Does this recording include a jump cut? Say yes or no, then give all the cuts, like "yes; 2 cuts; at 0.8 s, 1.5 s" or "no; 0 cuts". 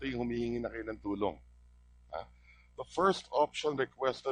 yes; 1 cut; at 2.8 s